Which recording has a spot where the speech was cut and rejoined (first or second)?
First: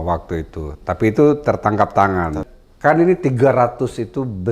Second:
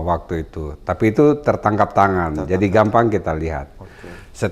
first